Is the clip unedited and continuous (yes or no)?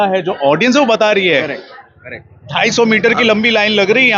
yes